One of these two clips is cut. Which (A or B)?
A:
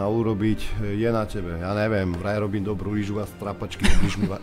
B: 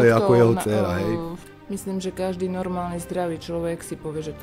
B